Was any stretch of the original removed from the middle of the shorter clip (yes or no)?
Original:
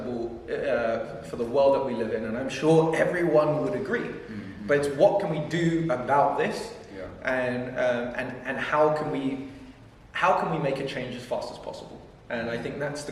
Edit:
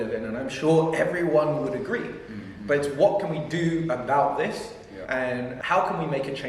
yes